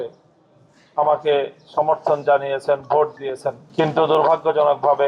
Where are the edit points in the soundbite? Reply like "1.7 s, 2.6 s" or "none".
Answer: 3.6 s